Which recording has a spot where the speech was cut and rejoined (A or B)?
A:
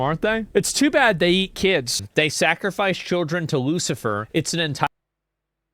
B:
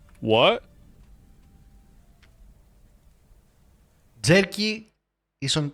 A